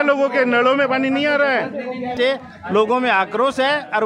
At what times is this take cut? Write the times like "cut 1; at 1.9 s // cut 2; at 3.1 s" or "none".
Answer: cut 1; at 2.1 s